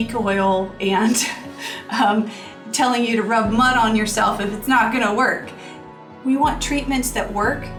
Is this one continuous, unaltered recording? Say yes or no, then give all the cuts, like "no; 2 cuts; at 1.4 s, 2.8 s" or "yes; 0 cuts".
yes; 0 cuts